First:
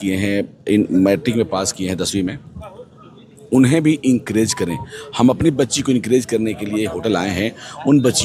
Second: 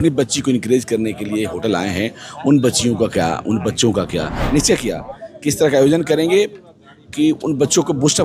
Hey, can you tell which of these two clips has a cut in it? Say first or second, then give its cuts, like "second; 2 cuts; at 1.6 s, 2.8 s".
second; 1 cut; at 4.4 s